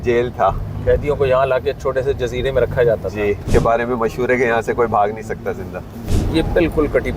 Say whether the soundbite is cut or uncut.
cut